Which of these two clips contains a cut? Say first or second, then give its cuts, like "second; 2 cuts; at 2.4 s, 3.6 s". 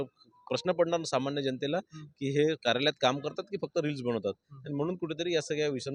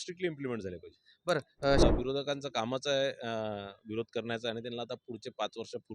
second; 1 cut; at 1.8 s